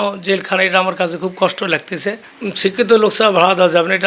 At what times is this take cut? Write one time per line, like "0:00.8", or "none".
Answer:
0:02.3

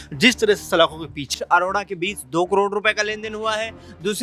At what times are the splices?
0:01.3

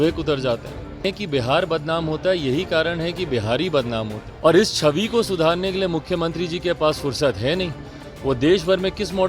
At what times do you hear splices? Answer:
0:01.1
0:04.2

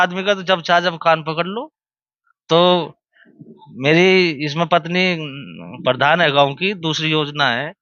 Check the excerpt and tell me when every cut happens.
none

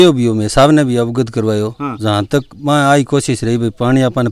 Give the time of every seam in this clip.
none

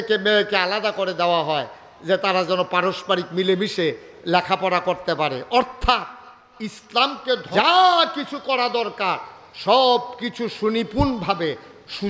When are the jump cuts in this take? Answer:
0:07.4

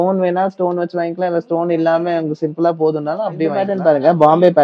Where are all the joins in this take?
0:03.7

